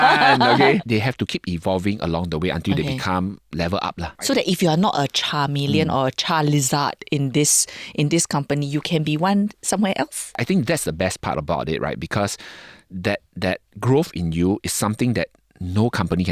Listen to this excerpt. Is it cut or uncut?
cut